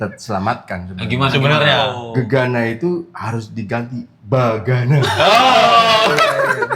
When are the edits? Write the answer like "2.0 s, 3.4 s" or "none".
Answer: 4.1 s

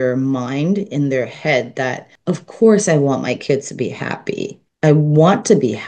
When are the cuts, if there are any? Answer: 2.1 s, 4.6 s

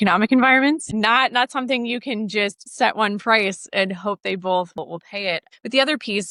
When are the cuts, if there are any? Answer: none

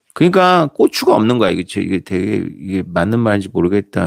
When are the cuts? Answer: none

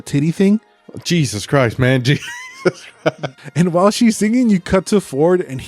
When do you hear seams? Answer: 3.4 s

